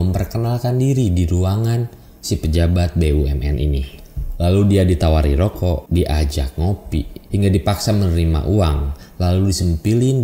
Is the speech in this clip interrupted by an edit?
yes; 2 cuts; at 5.8 s, 7.2 s

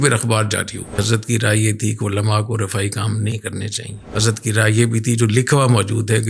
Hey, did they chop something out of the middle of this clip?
yes; 1 cut; at 1.0 s

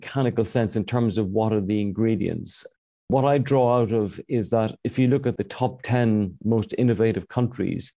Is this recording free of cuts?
no; 1 cut; at 5.4 s

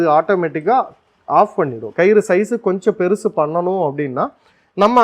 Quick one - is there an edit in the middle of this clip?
yes; 1 cut; at 1.8 s

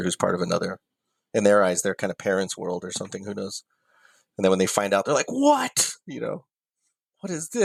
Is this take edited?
no; 0 cuts

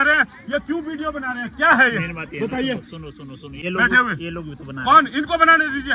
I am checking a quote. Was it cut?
yes; 1 cut; at 3.7 s

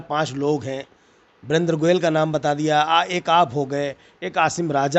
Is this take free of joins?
yes; 0 cuts

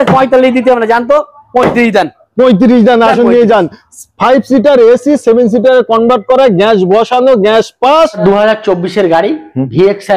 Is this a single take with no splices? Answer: no; 1 cut; at 8.2 s

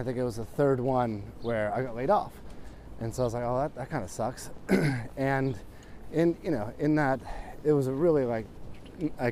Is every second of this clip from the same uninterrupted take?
yes; 0 cuts

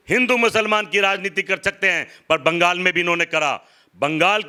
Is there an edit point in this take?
no; 0 cuts

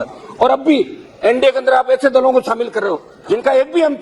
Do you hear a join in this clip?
no; 0 cuts

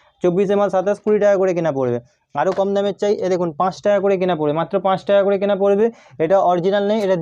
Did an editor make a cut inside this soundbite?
no; 0 cuts

